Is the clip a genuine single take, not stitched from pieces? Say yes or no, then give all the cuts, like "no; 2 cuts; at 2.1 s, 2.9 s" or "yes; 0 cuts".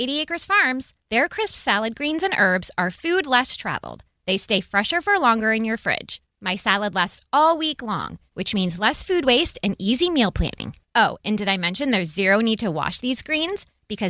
yes; 0 cuts